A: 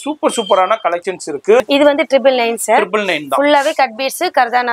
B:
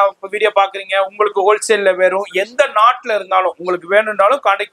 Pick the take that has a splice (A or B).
A